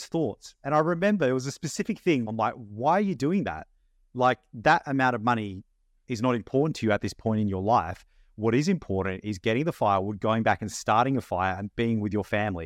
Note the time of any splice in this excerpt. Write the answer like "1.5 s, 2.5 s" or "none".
2.2 s